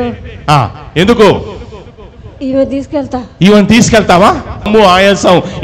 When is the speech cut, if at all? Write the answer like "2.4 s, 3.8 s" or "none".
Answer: 4.7 s